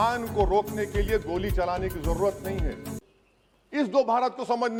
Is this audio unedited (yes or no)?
yes